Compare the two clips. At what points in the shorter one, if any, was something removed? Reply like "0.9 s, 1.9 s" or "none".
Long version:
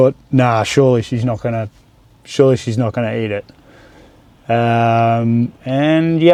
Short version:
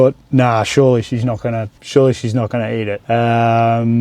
1.7 s, 3.0 s